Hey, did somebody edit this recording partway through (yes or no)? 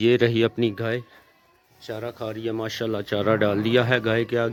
no